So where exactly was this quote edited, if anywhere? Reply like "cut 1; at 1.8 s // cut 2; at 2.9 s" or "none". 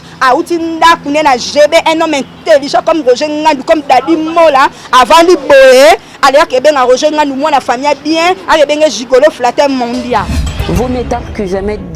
cut 1; at 10.4 s